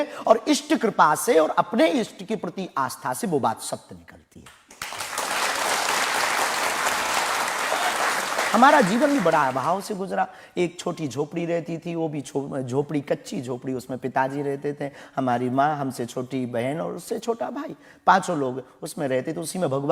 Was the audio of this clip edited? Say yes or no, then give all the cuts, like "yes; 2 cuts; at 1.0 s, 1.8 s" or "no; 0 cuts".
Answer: no; 0 cuts